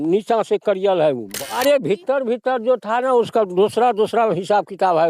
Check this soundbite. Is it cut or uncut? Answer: cut